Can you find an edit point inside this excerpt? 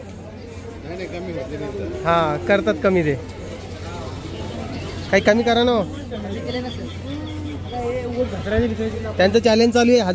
no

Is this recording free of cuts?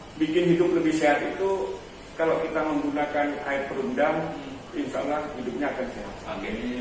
yes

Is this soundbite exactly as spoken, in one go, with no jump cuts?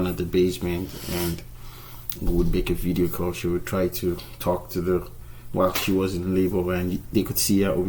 yes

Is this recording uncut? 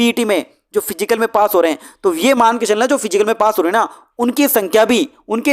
yes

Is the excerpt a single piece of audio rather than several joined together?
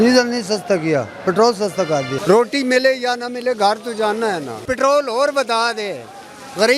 no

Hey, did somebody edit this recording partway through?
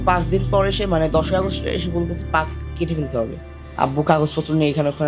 yes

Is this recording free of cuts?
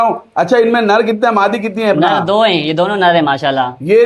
yes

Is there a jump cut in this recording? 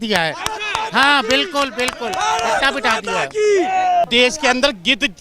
yes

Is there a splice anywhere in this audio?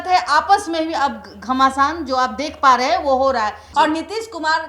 yes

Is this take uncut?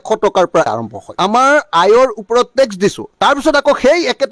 no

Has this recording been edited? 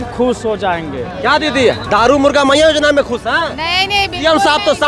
no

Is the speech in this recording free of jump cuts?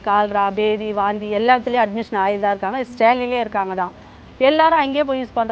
yes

